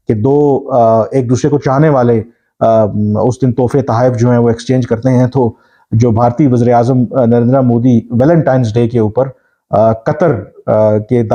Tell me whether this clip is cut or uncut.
uncut